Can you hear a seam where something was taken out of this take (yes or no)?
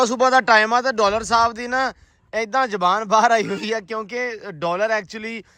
no